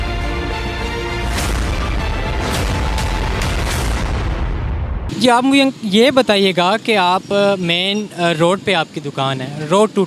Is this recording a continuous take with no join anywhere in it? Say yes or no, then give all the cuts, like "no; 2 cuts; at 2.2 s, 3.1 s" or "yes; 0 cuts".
yes; 0 cuts